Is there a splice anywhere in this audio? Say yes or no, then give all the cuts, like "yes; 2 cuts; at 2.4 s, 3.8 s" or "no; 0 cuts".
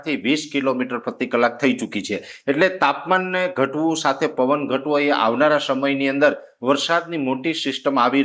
no; 0 cuts